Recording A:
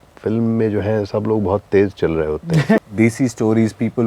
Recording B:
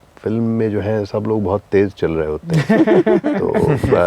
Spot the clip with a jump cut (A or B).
A